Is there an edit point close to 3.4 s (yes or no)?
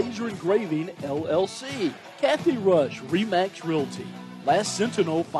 no